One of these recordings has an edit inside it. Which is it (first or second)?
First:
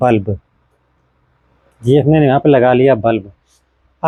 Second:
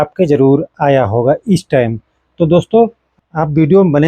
second